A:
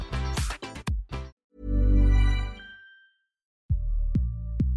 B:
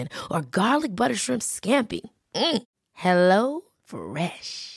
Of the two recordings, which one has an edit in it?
A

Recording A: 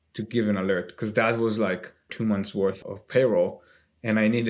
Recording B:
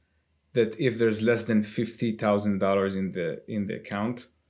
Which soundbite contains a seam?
A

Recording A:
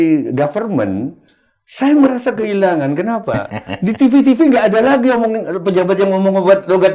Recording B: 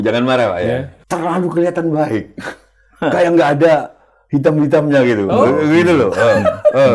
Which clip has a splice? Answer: B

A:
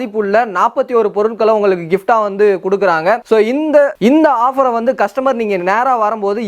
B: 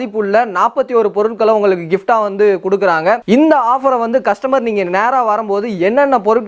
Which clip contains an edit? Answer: B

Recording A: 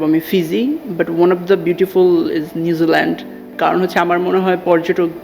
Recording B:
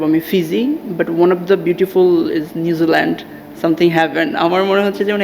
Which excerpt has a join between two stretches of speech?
A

